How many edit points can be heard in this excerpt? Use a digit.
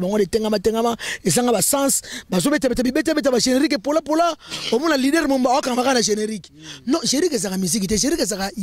0